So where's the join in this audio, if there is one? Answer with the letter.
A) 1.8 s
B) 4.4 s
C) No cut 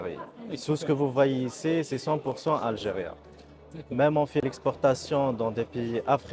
B